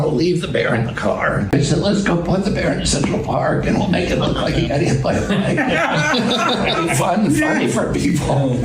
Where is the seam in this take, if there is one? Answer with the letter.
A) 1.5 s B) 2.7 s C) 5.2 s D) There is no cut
A